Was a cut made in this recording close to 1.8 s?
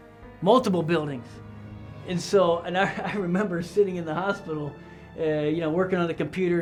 no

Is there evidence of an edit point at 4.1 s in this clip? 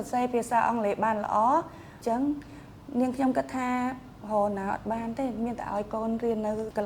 no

